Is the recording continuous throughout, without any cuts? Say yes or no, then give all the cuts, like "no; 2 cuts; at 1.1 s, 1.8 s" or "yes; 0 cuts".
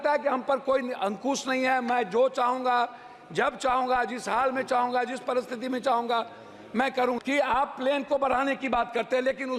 no; 1 cut; at 7.2 s